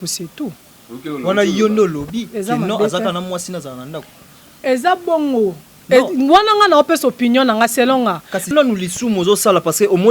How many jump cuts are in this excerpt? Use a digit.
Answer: 1